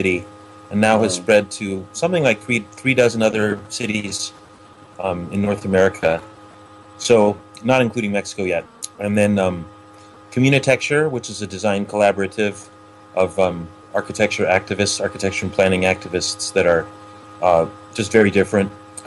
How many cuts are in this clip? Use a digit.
1